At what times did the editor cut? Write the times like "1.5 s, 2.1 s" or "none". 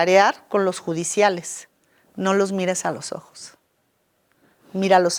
none